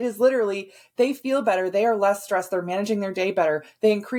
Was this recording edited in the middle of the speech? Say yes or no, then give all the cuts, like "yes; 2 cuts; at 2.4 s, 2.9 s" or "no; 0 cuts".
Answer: no; 0 cuts